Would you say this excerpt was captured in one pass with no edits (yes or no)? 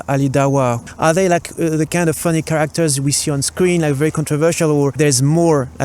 no